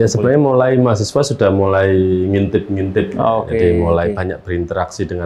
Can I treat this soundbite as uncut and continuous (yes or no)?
yes